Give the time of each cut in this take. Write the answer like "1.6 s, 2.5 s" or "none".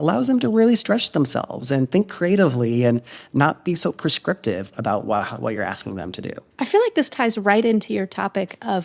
6.4 s